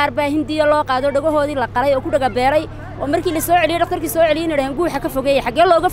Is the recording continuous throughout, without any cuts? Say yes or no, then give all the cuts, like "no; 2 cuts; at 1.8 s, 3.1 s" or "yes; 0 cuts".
yes; 0 cuts